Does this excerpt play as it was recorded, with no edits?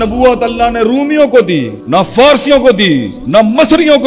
no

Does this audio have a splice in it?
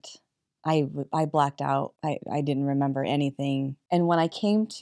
yes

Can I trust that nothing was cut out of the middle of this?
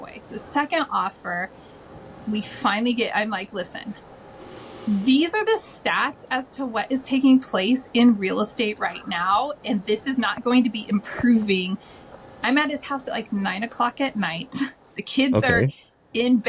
yes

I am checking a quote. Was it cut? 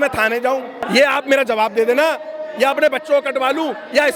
no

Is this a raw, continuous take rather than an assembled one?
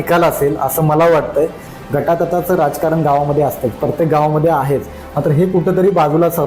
no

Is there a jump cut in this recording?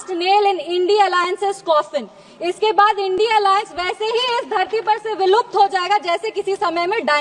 no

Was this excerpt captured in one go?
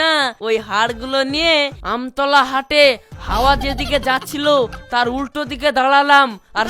yes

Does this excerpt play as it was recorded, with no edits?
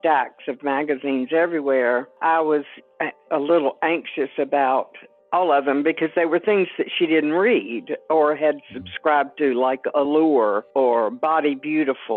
yes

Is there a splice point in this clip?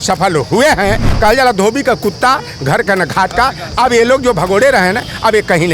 yes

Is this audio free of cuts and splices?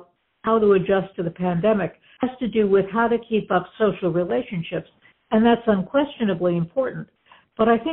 yes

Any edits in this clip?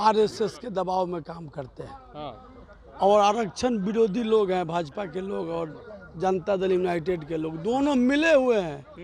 no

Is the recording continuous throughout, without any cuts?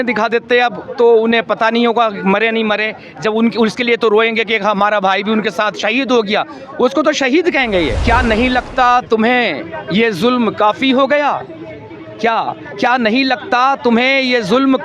no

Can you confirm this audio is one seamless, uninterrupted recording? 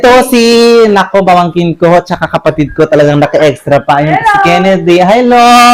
yes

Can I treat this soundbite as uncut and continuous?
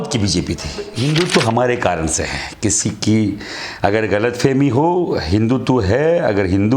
no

